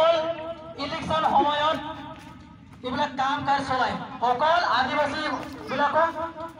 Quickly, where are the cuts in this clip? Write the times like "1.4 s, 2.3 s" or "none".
none